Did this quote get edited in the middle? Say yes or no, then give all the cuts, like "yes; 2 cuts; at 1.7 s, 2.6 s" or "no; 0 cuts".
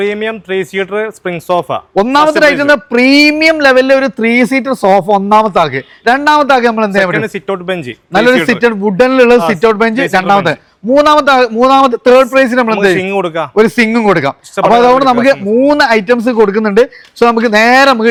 no; 0 cuts